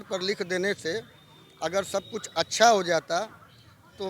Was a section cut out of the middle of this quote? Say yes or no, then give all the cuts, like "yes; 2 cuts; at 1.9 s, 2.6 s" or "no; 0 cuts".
no; 0 cuts